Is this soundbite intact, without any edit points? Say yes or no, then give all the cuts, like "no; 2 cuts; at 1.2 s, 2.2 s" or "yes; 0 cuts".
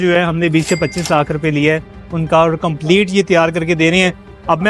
yes; 0 cuts